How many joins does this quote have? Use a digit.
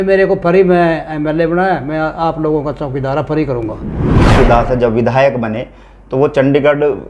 1